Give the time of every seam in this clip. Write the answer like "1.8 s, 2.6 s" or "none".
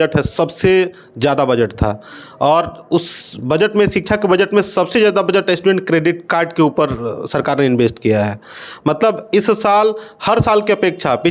none